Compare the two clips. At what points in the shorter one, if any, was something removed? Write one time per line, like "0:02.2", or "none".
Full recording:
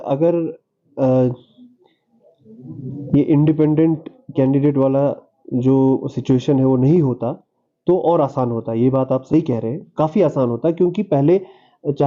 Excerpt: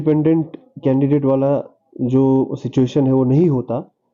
none